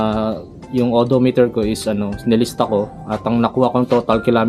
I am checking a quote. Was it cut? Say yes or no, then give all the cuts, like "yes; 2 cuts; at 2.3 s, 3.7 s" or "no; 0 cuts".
no; 0 cuts